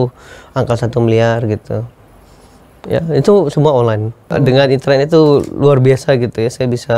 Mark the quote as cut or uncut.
cut